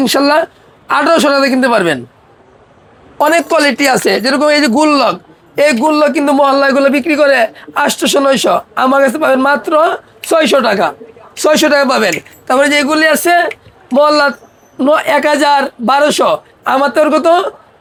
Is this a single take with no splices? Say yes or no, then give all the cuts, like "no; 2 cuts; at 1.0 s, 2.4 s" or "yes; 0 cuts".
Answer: yes; 0 cuts